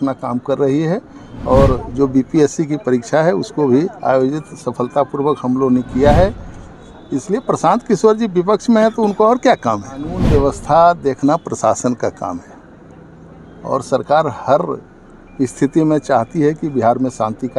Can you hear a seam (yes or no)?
yes